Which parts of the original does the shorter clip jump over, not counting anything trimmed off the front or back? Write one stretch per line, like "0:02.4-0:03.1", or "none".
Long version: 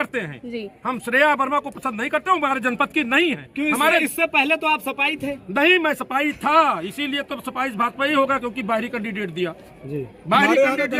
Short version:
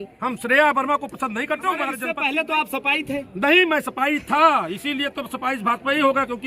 0:02.7-0:04.2